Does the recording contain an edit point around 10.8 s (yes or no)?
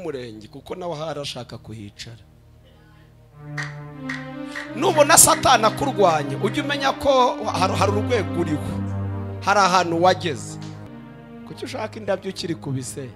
yes